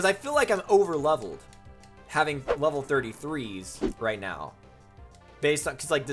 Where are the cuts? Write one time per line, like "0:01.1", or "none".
0:03.8